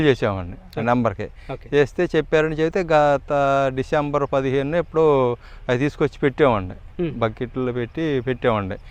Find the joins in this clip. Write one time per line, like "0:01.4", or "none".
none